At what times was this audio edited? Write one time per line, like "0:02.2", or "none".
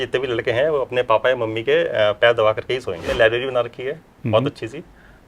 0:03.0